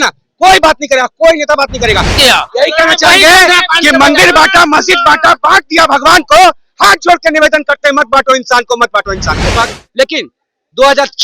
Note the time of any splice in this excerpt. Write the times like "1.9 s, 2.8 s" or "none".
2.2 s, 9.5 s